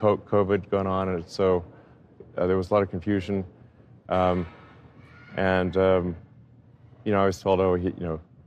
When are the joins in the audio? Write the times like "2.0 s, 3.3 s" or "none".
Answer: 1.3 s